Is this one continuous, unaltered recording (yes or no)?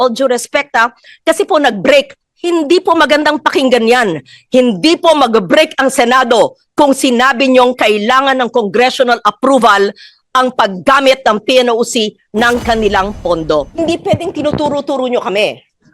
no